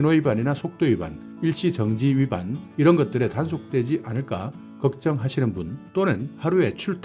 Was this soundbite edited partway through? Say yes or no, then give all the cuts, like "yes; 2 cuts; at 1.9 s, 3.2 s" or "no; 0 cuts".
no; 0 cuts